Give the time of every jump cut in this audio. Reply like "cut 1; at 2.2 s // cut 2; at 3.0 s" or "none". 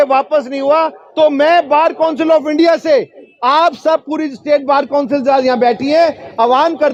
none